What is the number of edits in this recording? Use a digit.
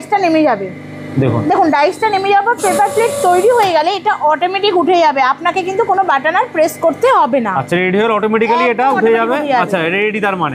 0